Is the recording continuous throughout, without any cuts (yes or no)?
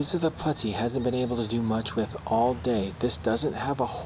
yes